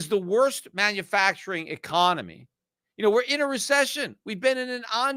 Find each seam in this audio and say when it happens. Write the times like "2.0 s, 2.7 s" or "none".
none